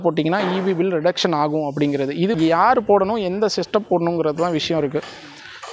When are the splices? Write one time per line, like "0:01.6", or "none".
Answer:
0:02.3